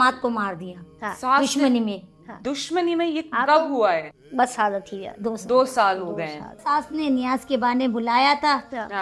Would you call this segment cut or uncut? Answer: cut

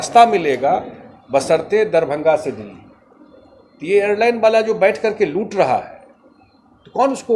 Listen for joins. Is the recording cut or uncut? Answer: uncut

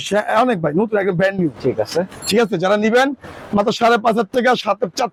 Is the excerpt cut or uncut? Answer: uncut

